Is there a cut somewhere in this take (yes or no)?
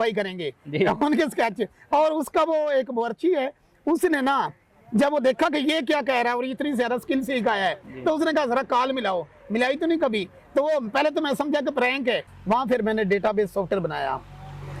yes